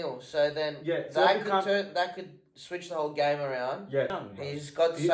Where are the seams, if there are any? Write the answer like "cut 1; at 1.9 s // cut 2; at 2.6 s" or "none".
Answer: cut 1; at 4.1 s